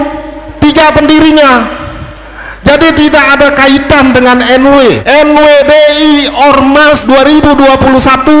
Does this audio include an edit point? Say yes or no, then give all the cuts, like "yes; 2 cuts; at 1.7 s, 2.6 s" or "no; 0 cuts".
yes; 2 cuts; at 5.0 s, 7.0 s